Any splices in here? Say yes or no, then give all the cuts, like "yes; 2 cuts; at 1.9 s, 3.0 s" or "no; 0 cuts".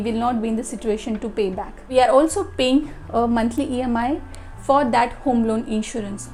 no; 0 cuts